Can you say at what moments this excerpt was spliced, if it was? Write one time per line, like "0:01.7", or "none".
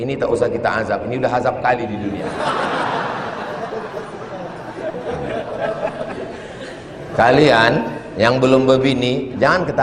none